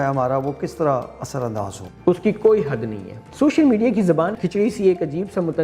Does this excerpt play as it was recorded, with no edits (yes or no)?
no